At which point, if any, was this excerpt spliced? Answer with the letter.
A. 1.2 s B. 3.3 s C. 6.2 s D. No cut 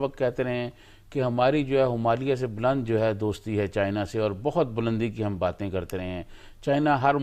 D